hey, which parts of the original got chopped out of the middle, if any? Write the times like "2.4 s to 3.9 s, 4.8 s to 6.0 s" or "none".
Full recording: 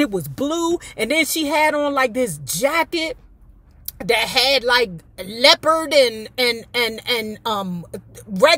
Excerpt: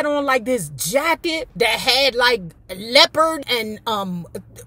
3.2 s to 4.0 s, 5.9 s to 7.0 s